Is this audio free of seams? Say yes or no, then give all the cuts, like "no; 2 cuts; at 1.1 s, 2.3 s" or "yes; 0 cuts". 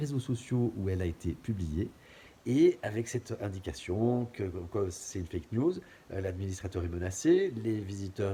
yes; 0 cuts